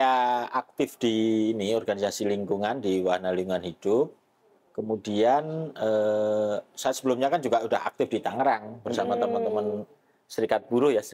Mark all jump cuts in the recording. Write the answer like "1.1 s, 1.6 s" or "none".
none